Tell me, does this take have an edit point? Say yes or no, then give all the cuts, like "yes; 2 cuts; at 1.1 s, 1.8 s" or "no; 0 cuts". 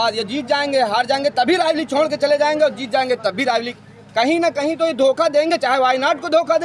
no; 0 cuts